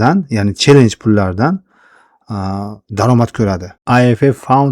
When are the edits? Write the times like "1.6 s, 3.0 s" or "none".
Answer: 3.7 s